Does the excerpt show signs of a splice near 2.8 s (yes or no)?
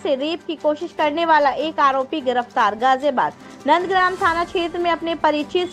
no